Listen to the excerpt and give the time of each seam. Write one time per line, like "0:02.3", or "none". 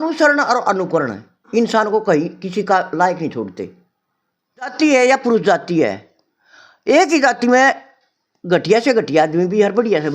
0:04.7